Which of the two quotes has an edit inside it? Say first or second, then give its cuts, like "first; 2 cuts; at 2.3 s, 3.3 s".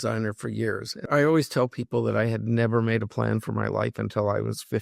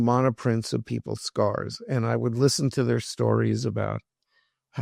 first; 1 cut; at 1.0 s